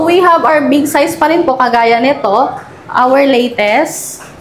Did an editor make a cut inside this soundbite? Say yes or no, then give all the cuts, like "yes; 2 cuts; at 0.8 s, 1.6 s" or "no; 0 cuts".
no; 0 cuts